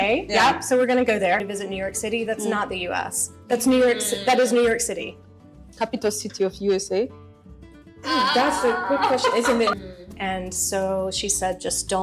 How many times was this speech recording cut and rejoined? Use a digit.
3